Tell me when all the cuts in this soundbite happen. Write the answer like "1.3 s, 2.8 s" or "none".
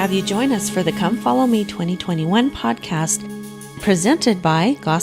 none